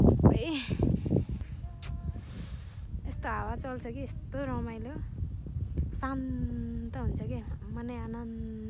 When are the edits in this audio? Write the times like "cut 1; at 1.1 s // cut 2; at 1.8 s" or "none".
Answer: cut 1; at 1.5 s